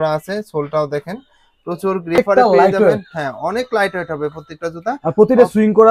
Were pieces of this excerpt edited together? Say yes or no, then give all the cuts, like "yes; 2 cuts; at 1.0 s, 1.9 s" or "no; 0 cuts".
yes; 1 cut; at 2.2 s